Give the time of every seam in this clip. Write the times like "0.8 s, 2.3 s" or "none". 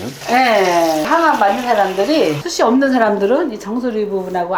1.0 s, 2.4 s